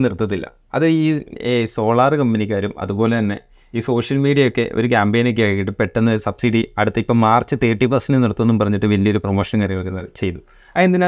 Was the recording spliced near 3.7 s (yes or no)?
no